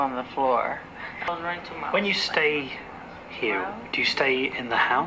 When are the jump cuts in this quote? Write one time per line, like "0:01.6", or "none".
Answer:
0:01.3

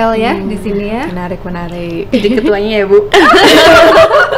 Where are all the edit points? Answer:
none

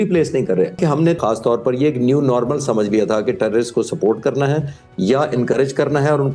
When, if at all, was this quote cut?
0:01.0

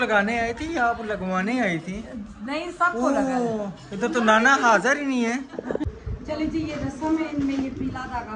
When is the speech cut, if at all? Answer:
0:06.0

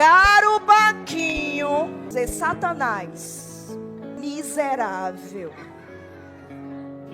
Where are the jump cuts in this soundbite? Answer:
0:02.1
0:04.2

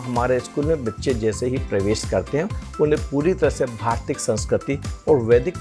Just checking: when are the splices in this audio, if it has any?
none

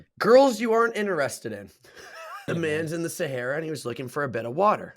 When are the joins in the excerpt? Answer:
0:02.3

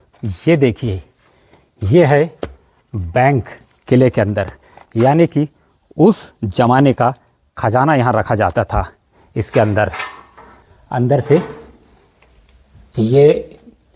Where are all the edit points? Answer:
none

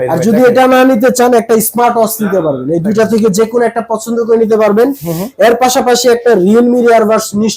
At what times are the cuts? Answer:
none

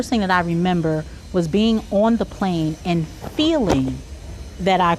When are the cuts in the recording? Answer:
none

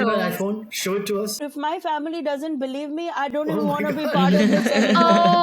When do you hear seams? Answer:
0:01.3

